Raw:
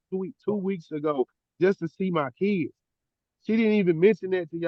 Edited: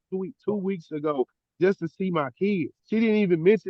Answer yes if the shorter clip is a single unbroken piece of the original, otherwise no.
no